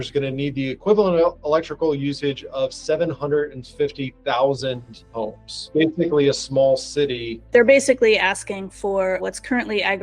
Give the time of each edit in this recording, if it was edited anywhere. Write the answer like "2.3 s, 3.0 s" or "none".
5.7 s, 7.3 s, 9.2 s